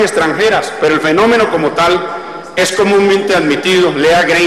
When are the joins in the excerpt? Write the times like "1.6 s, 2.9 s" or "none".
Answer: 1.8 s

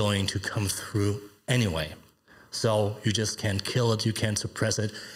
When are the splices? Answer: none

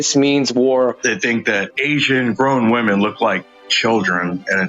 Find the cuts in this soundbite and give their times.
1.0 s

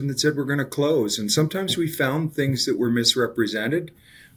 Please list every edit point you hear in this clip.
none

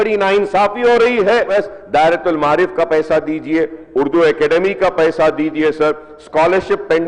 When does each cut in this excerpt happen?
1.5 s

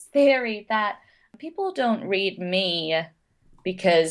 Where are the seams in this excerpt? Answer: 1.4 s

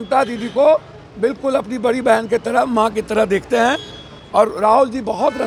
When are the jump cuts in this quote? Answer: none

